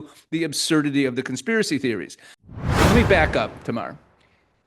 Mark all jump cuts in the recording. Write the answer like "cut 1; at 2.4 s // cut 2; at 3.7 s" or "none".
cut 1; at 2.5 s